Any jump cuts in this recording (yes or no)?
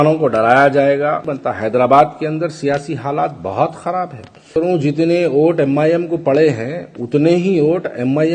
yes